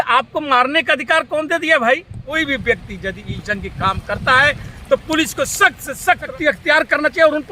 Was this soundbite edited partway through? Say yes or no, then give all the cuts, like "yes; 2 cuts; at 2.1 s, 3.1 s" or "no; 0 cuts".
yes; 2 cuts; at 2.2 s, 6.3 s